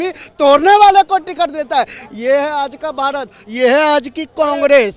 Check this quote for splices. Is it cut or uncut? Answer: uncut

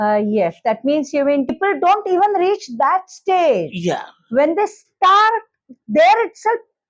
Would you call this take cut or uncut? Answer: cut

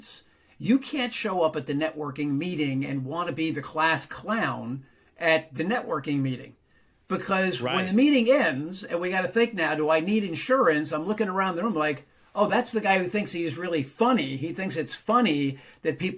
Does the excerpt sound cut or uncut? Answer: uncut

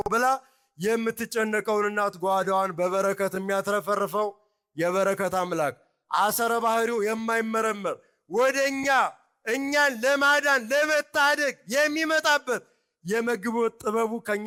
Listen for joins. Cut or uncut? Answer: uncut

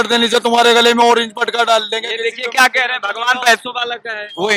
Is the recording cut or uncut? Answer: uncut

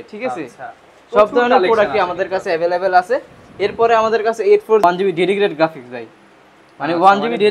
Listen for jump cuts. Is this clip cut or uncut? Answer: cut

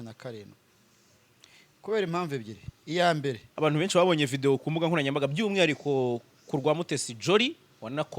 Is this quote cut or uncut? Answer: cut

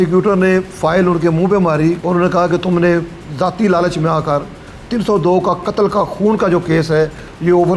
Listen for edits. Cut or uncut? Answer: cut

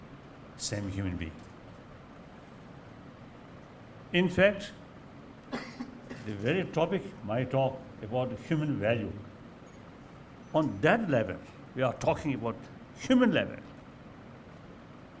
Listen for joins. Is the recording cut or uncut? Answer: uncut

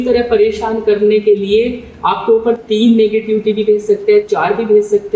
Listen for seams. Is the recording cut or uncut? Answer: uncut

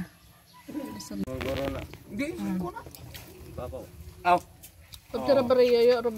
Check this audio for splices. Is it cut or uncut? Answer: cut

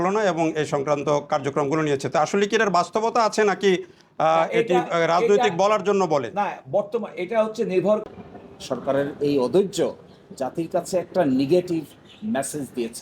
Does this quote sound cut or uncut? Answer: cut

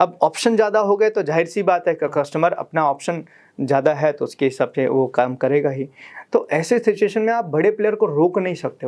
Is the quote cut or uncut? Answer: uncut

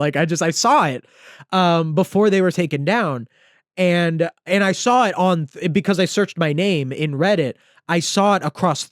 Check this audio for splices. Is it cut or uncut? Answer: uncut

